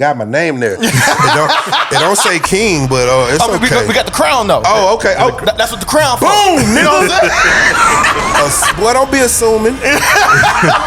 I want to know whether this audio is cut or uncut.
uncut